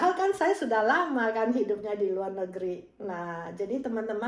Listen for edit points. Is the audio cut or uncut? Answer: uncut